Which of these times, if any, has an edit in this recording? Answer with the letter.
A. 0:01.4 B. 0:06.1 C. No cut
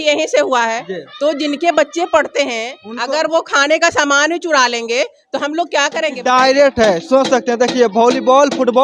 B